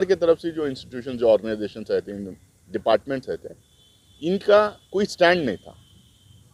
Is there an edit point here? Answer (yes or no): no